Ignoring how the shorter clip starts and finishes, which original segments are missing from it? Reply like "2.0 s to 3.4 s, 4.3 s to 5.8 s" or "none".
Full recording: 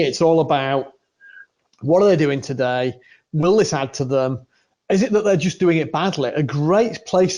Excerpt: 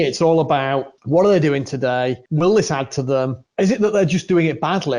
0.9 s to 1.7 s, 3.0 s to 3.3 s, 4.4 s to 4.7 s

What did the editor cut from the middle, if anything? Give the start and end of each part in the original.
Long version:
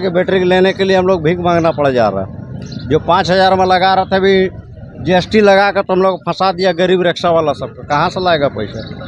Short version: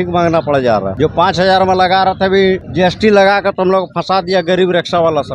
2.2 s to 2.8 s, 4.6 s to 5.0 s

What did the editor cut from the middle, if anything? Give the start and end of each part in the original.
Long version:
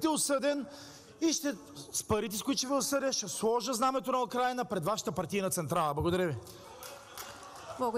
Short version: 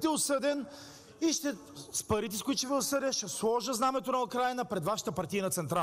none

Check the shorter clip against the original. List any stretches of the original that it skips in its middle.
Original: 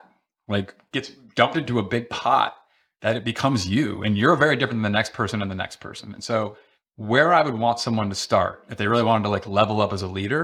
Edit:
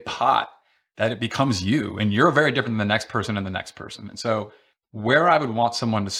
none

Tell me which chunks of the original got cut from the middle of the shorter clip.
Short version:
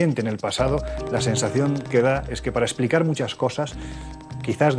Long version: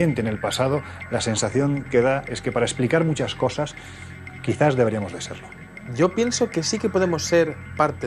none

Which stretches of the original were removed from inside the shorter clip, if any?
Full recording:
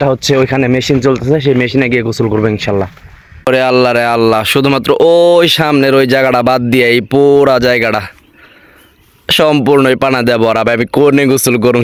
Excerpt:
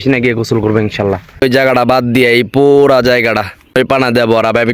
3.1 s to 6.0 s, 8.3 s to 9.9 s

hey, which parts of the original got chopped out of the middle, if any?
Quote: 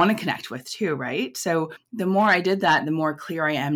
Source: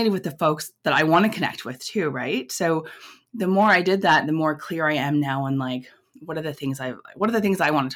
3.0 s to 3.2 s

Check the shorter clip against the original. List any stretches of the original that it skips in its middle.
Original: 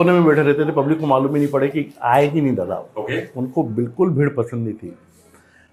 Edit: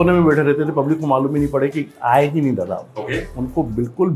none

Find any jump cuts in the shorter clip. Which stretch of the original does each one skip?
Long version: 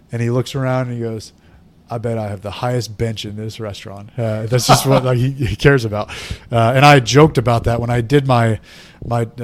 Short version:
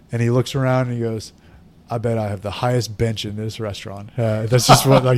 none

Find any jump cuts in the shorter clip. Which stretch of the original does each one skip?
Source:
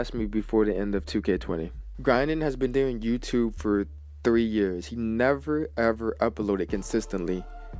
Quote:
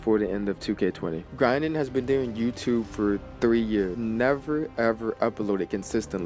1.7 s to 1.9 s, 3.9 s to 4.1 s, 4.8 s to 4.9 s

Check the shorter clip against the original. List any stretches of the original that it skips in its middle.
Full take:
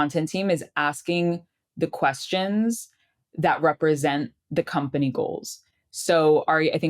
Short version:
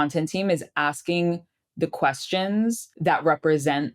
2.9 s to 3.3 s

